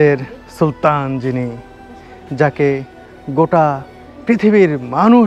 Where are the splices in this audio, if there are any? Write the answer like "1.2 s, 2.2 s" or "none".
none